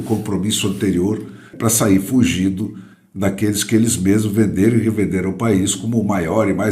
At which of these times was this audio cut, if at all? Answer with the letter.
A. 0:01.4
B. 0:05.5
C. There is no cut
A